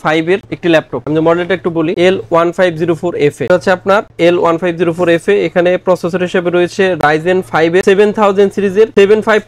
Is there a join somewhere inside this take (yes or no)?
no